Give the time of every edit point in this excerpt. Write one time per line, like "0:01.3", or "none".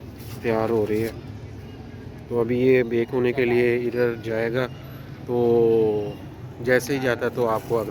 none